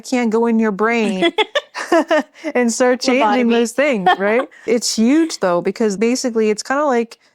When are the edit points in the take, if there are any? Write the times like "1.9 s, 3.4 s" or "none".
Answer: 4.7 s, 6.0 s